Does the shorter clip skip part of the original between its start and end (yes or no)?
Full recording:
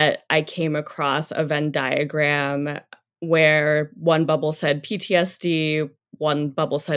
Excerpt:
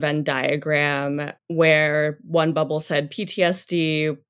yes